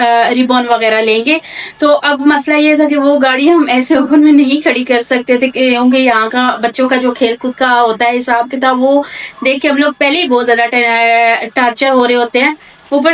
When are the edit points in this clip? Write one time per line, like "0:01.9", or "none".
none